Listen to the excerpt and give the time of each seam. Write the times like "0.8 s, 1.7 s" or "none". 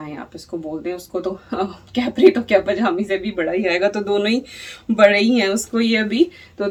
none